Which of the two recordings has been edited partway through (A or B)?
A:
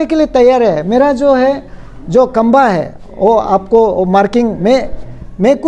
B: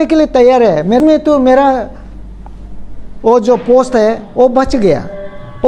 B